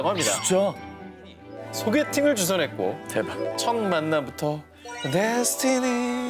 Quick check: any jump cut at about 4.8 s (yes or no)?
no